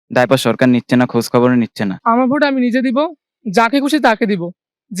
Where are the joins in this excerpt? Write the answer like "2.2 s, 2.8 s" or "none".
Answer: 1.9 s